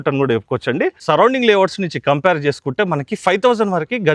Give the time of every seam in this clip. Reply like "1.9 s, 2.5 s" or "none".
1.0 s